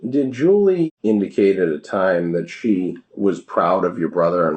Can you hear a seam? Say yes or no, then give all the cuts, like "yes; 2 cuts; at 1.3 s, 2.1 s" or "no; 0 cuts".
yes; 2 cuts; at 1.0 s, 3.0 s